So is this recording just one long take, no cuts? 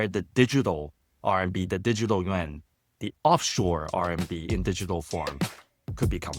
yes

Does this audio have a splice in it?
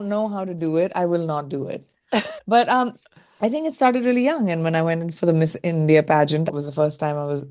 yes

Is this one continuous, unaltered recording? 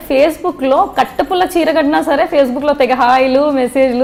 yes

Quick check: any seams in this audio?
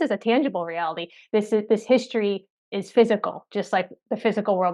no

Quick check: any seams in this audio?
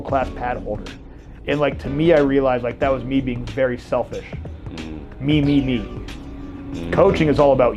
no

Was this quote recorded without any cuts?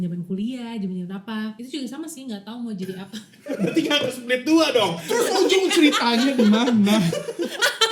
yes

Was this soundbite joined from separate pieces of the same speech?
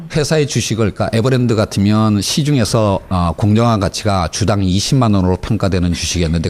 yes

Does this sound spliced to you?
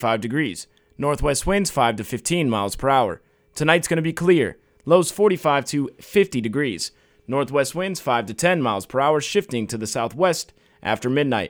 no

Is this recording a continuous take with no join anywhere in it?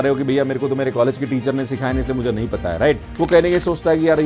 no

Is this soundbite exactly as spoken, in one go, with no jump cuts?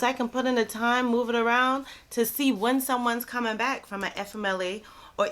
yes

